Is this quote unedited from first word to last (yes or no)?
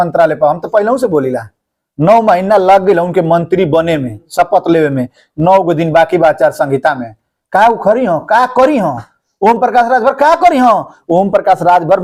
yes